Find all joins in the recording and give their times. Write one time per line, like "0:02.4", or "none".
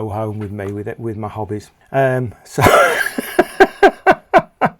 0:01.7